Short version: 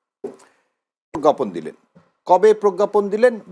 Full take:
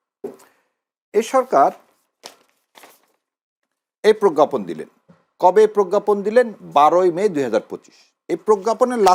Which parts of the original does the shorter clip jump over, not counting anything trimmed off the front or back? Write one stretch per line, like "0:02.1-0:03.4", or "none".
0:01.2-0:04.3